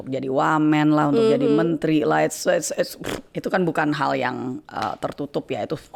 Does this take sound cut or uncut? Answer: uncut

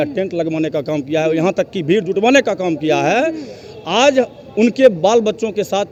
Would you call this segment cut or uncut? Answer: uncut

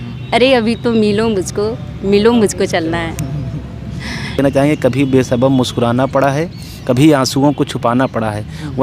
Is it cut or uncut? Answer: cut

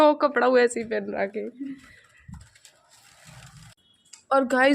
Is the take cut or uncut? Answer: cut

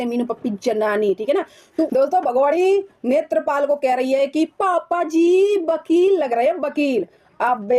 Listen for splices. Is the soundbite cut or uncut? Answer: cut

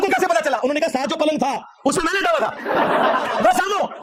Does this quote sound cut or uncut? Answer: uncut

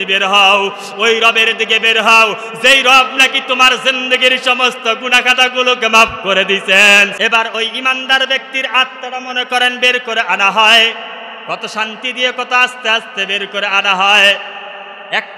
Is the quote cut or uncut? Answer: cut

